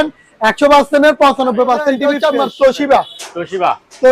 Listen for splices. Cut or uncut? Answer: cut